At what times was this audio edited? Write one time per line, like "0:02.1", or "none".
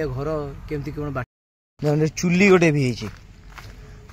0:01.2